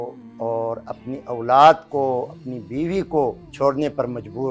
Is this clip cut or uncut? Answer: cut